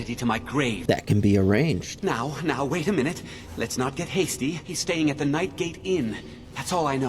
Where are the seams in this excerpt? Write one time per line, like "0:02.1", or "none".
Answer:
0:00.8
0:01.9
0:04.7